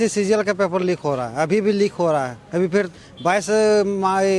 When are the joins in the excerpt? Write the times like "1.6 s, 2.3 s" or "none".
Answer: none